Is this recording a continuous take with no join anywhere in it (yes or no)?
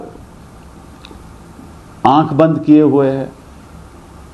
yes